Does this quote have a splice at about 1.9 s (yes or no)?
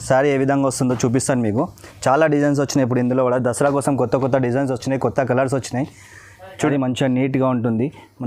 no